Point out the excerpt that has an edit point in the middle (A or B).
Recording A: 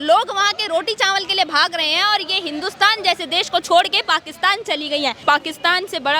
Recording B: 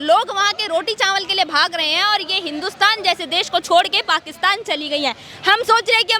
A